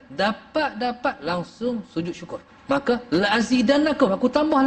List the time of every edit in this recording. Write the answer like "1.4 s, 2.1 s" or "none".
2.5 s